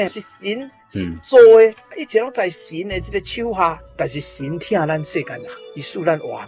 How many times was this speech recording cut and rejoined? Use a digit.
1